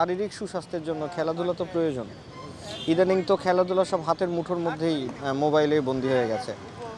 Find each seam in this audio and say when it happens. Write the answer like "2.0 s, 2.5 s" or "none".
none